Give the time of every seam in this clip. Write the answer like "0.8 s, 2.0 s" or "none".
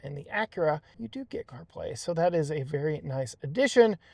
1.0 s